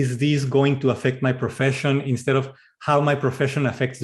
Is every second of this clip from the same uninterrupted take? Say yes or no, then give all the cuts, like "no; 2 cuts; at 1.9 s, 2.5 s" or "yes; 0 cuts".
yes; 0 cuts